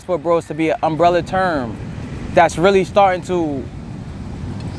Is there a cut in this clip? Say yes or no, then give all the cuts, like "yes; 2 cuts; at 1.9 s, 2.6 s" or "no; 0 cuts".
no; 0 cuts